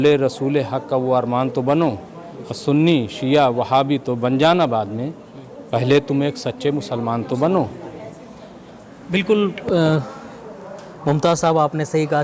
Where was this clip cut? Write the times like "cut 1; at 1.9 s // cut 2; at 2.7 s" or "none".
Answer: none